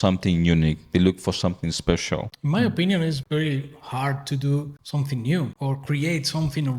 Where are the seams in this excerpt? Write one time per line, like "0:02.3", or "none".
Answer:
0:02.3
0:03.2
0:04.8
0:05.5